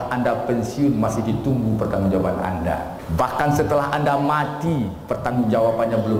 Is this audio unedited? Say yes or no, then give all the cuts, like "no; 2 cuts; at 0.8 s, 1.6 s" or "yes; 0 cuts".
no; 1 cut; at 3.0 s